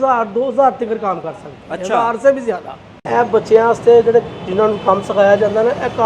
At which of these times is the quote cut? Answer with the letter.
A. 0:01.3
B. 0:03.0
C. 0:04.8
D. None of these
B